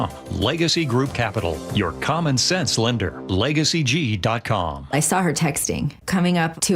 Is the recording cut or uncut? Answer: cut